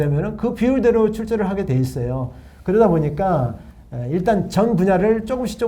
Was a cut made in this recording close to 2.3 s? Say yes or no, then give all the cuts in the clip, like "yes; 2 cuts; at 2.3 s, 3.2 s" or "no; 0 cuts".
no; 0 cuts